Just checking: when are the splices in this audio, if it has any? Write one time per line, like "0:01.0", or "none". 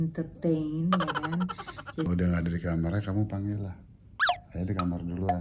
0:02.0